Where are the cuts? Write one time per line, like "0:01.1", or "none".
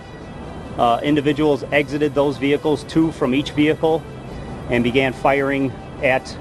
none